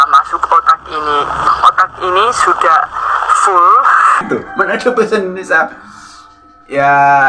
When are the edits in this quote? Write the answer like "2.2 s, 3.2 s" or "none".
4.2 s